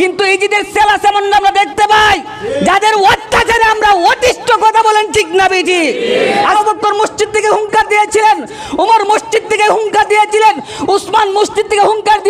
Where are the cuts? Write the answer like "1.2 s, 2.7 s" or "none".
6.5 s